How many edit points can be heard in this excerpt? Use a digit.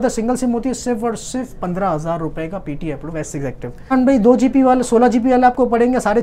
1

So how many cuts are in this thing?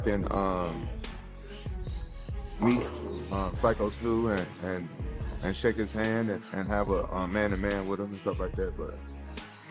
0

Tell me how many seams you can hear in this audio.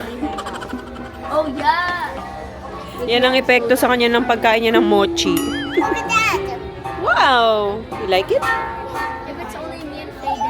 0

